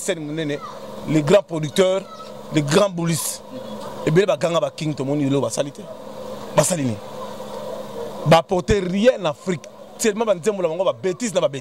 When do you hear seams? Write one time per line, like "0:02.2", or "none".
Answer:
none

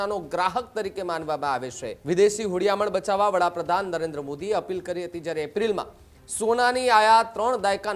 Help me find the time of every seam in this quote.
0:02.0

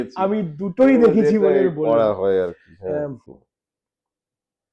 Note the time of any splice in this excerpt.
0:03.3

